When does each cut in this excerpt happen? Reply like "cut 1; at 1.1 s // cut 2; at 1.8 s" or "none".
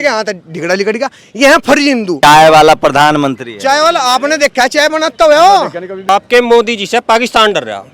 cut 1; at 2.2 s // cut 2; at 5.9 s